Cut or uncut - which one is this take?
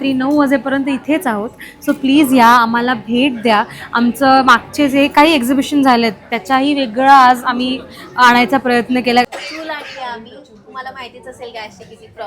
cut